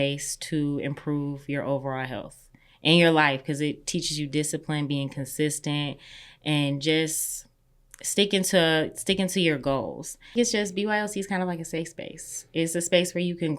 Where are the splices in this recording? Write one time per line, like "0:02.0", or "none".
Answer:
0:10.3